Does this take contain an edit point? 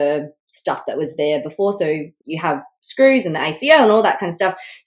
yes; 1 cut; at 2.1 s

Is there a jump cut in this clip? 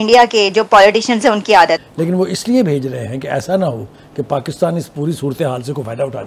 yes; 1 cut; at 1.8 s

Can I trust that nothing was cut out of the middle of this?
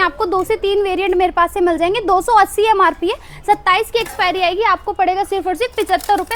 yes; 0 cuts

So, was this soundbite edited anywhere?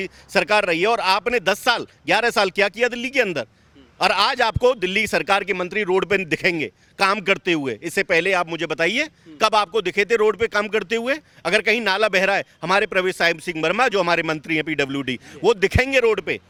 no; 0 cuts

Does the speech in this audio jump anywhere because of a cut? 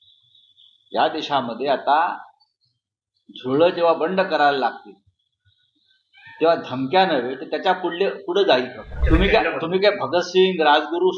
yes; 1 cut; at 8.9 s

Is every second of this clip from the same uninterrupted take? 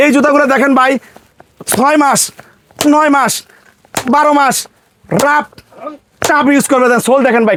yes; 0 cuts

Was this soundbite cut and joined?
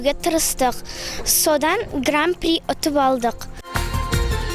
yes; 1 cut; at 3.5 s

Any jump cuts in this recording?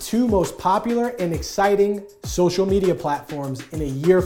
no; 0 cuts

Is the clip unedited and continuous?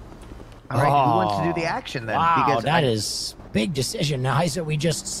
yes; 0 cuts

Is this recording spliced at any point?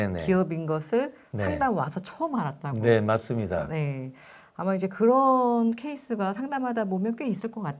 no; 0 cuts

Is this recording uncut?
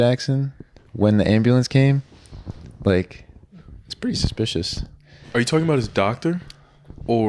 yes; 0 cuts

